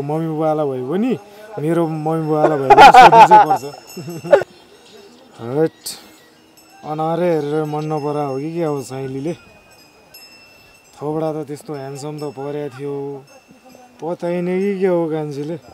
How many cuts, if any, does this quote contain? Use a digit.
1